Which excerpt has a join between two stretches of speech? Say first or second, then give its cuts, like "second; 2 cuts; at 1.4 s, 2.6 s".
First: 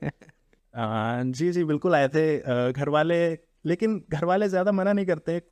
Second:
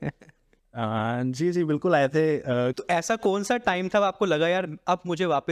second; 1 cut; at 2.8 s